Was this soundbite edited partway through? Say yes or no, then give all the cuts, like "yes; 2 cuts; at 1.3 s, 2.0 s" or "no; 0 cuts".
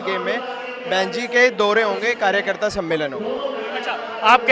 no; 0 cuts